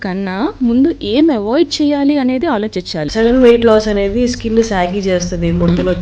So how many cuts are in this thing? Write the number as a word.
one